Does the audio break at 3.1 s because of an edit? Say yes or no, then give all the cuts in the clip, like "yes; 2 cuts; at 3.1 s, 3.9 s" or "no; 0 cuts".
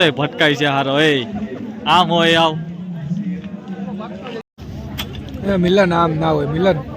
no; 1 cut; at 4.5 s